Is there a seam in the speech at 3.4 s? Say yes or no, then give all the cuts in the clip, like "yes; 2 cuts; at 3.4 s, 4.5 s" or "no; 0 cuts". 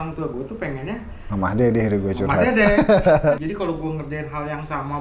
yes; 1 cut; at 3.4 s